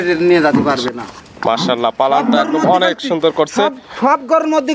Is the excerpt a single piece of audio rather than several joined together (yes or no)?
yes